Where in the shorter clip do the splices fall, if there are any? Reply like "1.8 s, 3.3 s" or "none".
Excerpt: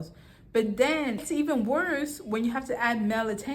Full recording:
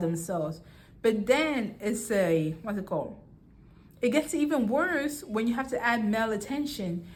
1.2 s